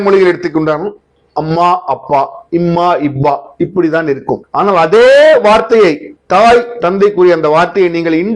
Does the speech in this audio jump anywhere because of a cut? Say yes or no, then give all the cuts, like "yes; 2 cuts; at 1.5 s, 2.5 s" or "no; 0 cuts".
yes; 2 cuts; at 4.5 s, 6.1 s